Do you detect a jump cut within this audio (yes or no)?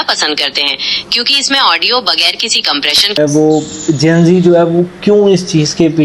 yes